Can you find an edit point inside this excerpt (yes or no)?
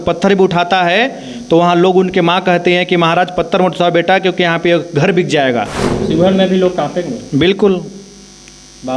yes